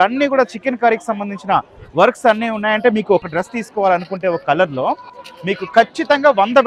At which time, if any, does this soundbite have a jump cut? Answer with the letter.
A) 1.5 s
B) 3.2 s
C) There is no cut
B